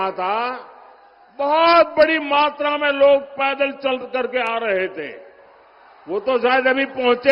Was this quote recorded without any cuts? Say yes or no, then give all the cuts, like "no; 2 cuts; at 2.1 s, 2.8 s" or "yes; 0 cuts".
yes; 0 cuts